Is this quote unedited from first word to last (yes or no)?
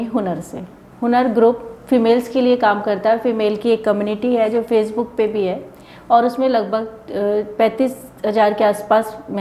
yes